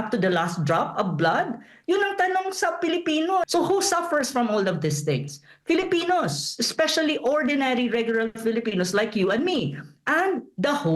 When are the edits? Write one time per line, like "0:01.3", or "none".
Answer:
0:03.4

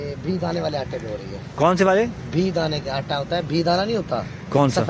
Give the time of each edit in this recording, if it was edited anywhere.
none

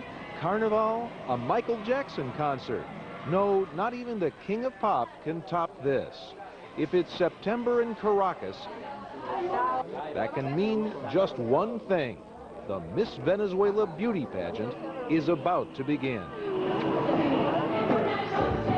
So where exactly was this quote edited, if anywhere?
none

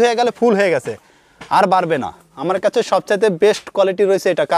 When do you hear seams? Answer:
0:02.3

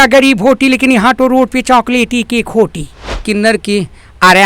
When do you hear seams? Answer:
0:03.2

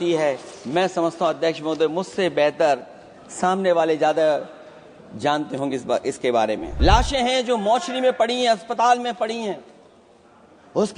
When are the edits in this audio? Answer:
0:06.7

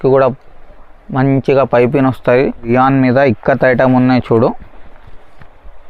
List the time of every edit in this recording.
0:02.7

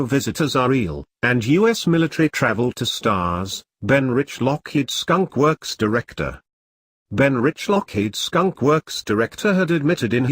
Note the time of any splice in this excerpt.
0:02.7
0:09.1

